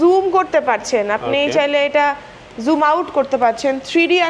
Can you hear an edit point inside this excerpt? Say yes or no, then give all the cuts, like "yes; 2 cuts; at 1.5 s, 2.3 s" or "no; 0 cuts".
no; 0 cuts